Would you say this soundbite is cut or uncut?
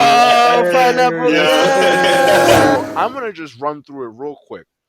cut